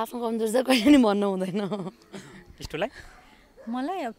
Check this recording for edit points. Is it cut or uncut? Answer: uncut